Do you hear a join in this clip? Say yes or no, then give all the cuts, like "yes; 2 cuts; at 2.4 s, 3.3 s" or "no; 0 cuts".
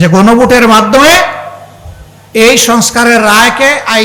no; 0 cuts